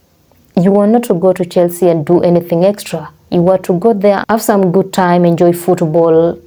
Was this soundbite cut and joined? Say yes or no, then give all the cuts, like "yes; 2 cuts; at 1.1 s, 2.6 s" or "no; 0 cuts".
no; 0 cuts